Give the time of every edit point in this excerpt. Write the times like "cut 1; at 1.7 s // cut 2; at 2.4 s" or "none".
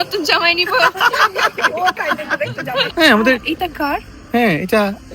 cut 1; at 2.9 s